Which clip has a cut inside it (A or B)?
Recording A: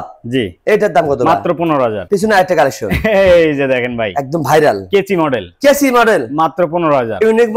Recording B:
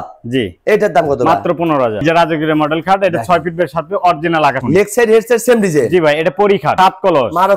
B